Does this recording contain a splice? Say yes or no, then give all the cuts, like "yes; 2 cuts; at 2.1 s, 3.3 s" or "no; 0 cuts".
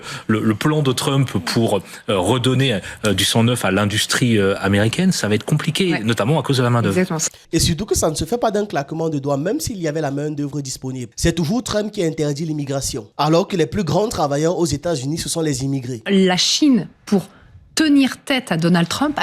yes; 2 cuts; at 11.1 s, 16.0 s